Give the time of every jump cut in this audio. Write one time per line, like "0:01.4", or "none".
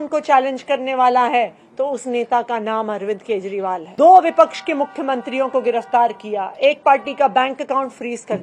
0:03.9